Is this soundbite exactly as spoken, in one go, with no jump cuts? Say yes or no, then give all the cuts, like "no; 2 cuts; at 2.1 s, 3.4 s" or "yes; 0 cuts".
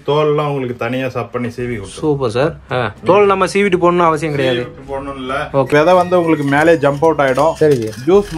no; 1 cut; at 5.7 s